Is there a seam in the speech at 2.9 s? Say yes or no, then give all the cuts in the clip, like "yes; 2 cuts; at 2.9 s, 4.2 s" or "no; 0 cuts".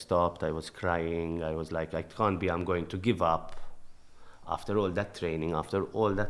no; 0 cuts